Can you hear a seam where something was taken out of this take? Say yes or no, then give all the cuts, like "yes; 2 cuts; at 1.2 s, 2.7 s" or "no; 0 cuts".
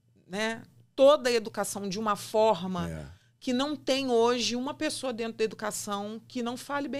no; 0 cuts